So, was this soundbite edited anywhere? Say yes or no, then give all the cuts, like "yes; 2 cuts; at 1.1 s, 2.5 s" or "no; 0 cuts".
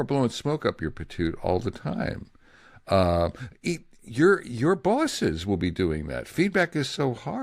no; 0 cuts